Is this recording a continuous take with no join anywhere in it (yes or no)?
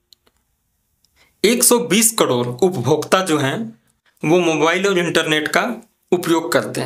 yes